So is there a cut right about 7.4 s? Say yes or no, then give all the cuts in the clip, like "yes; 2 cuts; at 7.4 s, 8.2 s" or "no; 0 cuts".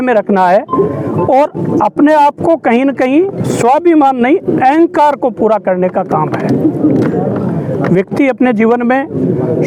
no; 0 cuts